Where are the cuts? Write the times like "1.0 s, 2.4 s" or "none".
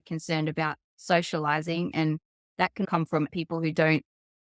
3.0 s

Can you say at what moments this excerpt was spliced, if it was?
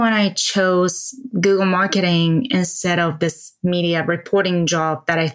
none

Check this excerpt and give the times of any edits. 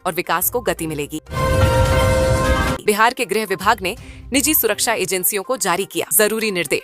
1.2 s, 2.8 s

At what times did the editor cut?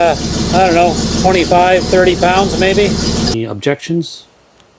3.3 s

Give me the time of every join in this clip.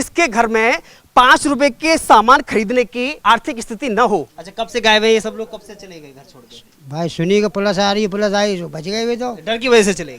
3.1 s, 4.4 s

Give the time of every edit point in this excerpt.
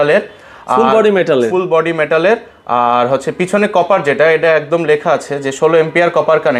none

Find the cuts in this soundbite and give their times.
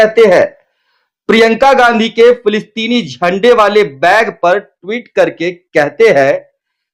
none

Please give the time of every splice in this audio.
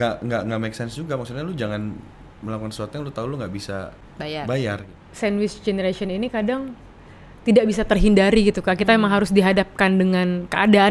4.0 s, 4.9 s

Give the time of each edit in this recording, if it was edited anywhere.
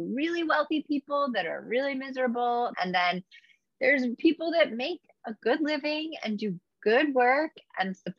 2.7 s

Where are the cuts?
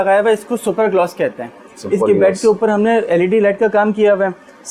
none

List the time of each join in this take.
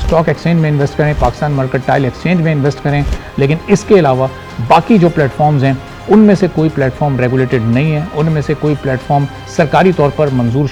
none

